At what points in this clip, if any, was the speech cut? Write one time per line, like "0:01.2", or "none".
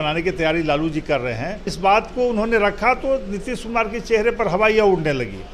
0:01.7